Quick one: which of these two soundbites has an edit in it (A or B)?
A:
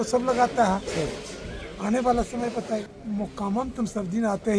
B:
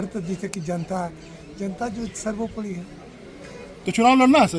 A